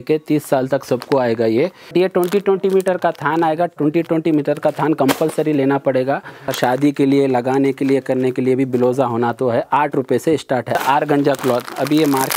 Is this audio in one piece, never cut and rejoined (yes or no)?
no